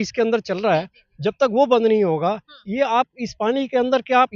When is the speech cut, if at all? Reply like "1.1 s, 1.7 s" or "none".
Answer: none